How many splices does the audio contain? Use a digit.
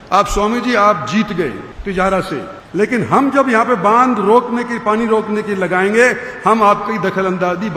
2